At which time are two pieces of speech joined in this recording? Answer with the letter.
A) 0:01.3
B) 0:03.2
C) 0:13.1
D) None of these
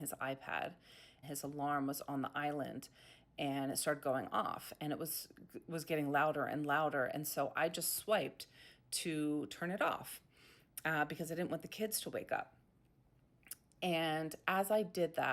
A